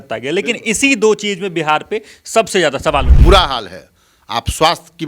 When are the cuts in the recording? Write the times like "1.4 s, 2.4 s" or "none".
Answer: 3.1 s